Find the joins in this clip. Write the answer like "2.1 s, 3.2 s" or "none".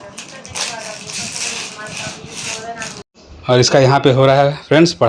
3.2 s